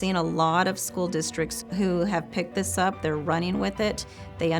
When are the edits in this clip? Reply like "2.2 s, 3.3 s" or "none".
1.6 s